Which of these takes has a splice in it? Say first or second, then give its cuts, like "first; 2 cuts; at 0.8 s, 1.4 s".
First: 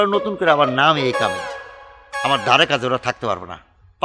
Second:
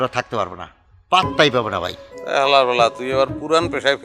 second; 1 cut; at 2.1 s